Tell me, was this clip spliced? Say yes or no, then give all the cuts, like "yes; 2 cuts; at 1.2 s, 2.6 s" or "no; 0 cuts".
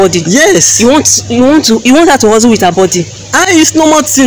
no; 0 cuts